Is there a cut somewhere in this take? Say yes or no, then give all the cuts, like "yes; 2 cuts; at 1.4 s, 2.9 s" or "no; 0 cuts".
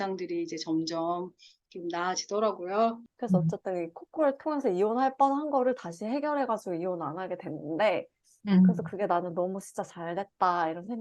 yes; 1 cut; at 3.1 s